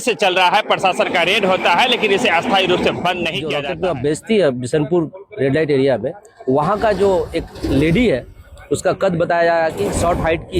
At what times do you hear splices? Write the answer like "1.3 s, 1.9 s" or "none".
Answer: 3.5 s